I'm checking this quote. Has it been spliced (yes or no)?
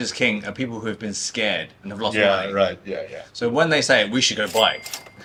no